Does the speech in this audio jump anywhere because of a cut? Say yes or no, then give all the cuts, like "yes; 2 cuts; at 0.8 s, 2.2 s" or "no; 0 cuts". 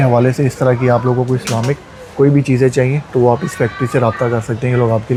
no; 0 cuts